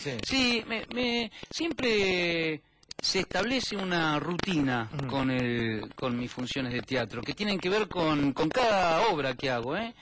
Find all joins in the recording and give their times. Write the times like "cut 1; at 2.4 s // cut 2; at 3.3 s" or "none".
cut 1; at 4.1 s